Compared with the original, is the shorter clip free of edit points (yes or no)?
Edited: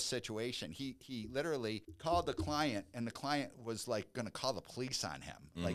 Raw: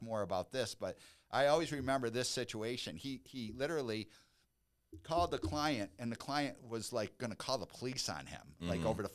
no